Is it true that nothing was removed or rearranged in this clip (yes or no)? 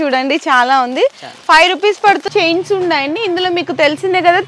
no